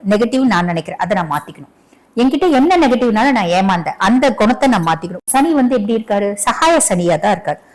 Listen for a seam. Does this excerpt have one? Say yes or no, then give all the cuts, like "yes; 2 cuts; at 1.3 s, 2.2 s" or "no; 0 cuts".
yes; 1 cut; at 5.2 s